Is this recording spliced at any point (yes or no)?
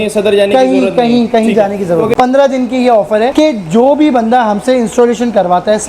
yes